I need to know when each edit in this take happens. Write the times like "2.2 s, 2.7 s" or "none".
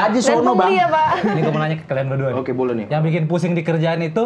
1.4 s